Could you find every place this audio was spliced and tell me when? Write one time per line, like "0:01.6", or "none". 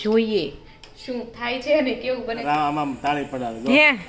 0:02.4